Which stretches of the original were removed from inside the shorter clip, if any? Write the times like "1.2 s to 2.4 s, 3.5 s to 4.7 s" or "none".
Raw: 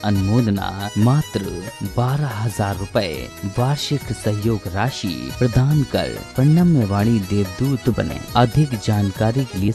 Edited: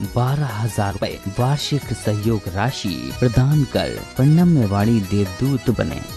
2.8 s to 3.2 s